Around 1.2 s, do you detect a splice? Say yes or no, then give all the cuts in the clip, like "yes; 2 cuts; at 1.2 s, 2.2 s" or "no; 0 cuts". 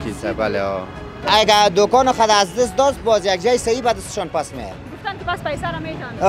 yes; 1 cut; at 1.2 s